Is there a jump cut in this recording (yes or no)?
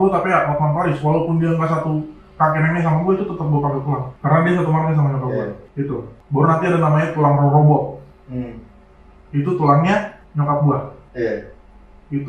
no